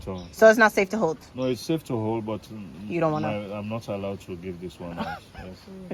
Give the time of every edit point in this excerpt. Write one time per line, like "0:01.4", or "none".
none